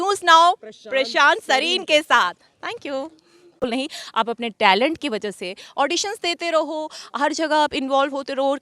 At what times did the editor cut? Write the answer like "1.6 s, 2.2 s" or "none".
3.6 s